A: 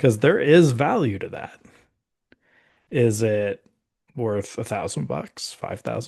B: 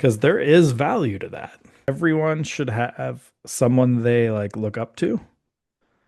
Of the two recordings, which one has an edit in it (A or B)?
B